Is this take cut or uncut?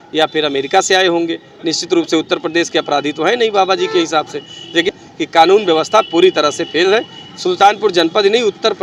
uncut